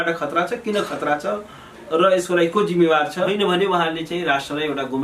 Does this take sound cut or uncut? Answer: cut